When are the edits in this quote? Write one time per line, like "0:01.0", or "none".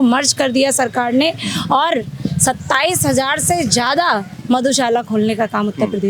none